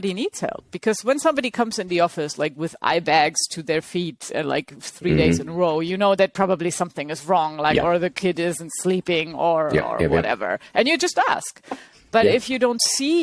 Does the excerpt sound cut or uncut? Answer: uncut